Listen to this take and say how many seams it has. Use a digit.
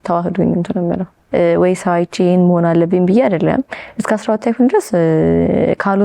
1